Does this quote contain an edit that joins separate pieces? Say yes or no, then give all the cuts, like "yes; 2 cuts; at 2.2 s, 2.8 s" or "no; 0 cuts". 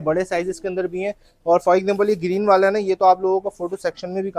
no; 0 cuts